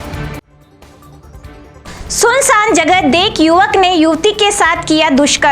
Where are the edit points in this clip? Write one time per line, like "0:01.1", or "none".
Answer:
0:01.3